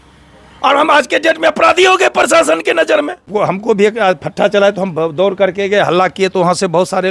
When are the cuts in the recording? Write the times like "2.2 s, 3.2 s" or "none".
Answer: 3.2 s